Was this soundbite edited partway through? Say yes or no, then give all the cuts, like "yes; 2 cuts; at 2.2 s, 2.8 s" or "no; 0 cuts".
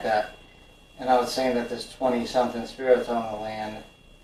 no; 0 cuts